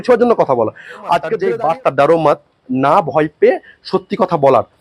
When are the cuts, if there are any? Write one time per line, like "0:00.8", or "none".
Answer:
0:01.3